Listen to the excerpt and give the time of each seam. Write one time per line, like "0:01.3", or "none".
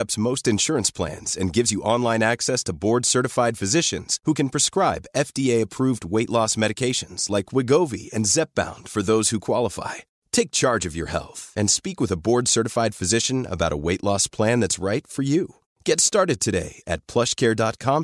none